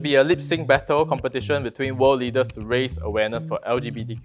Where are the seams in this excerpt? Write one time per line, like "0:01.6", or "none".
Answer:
none